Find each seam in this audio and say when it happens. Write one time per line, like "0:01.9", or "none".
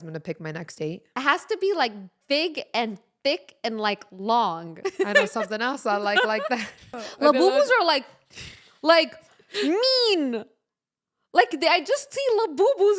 0:01.1
0:04.7
0:07.0